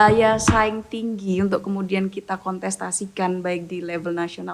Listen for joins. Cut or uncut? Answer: uncut